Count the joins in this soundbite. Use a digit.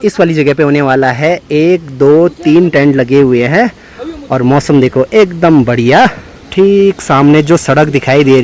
0